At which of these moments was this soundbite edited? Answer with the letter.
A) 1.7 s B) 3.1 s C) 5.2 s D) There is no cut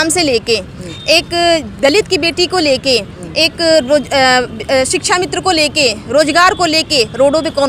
D